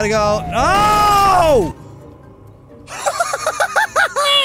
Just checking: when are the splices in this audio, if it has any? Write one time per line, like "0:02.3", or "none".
none